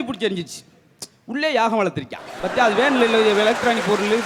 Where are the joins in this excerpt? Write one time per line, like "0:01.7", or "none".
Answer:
none